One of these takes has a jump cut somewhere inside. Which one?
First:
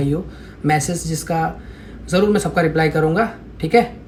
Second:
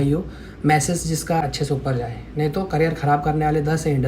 second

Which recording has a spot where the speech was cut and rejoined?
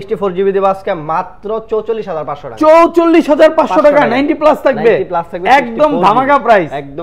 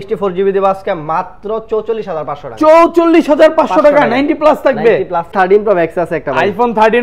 second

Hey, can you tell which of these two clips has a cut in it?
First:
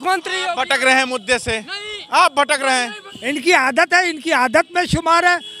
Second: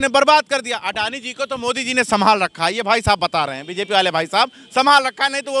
first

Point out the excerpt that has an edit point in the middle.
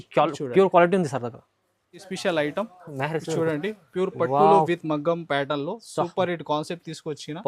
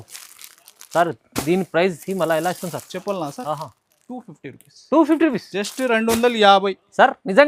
first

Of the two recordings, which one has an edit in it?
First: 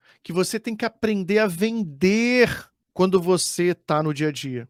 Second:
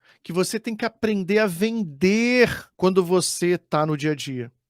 second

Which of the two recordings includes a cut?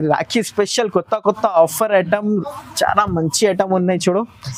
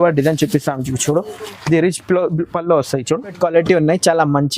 second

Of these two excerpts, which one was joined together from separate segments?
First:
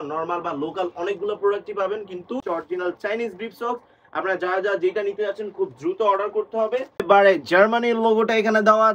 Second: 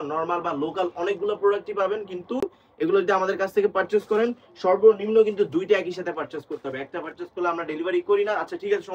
first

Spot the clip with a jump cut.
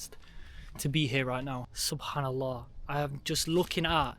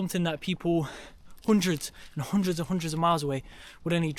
first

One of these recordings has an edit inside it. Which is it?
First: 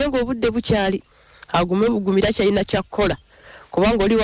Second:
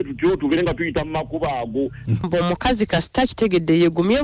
second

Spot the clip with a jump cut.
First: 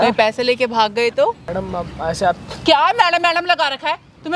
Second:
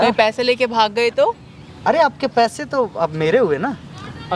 first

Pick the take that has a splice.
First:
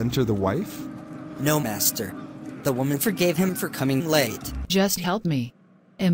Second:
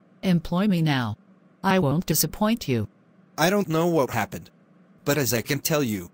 first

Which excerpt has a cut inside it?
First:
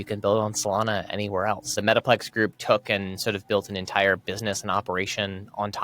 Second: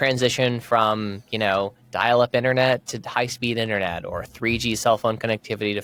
first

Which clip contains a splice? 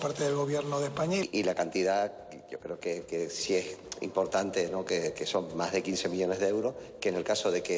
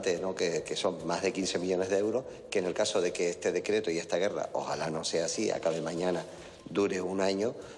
first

